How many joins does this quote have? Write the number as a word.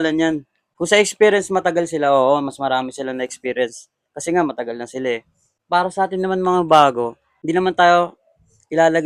zero